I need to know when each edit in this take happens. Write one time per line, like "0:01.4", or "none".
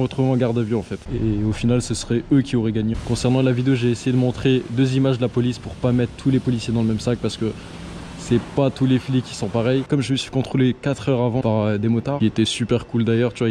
none